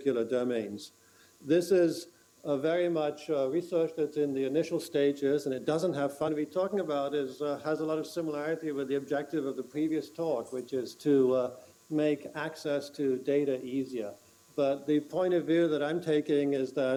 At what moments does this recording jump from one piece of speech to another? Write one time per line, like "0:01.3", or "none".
none